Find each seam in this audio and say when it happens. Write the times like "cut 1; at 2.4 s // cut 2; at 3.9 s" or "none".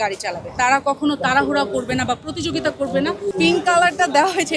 cut 1; at 3.3 s